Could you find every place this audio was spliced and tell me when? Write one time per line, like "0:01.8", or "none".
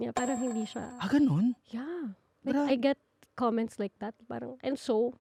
none